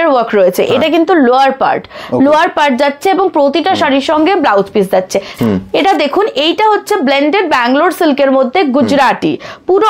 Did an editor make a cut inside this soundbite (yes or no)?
yes